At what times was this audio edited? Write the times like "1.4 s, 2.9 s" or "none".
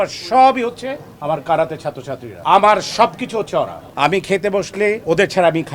2.4 s, 3.8 s